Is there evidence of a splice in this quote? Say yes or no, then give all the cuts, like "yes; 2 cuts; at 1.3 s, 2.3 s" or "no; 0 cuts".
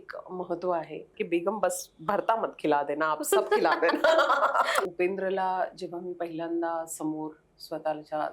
yes; 2 cuts; at 1.1 s, 4.8 s